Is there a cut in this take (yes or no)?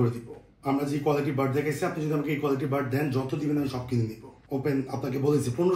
no